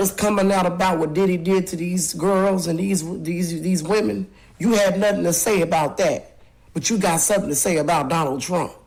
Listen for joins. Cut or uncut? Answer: uncut